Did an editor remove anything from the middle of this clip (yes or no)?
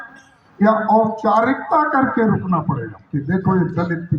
yes